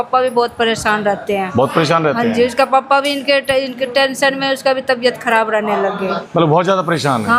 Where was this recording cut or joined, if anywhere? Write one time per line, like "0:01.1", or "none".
0:06.2